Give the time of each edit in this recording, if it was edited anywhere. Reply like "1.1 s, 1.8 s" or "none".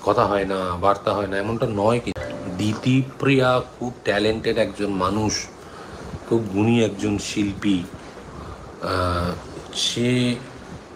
none